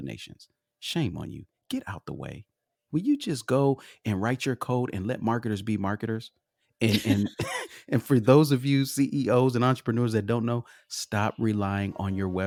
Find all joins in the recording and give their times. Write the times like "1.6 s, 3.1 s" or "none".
none